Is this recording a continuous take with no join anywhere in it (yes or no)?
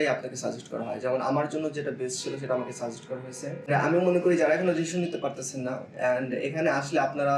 yes